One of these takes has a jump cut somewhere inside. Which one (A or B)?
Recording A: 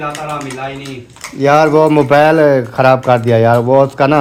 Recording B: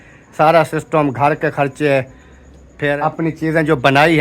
B